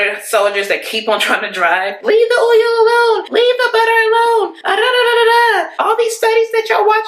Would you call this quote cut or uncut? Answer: uncut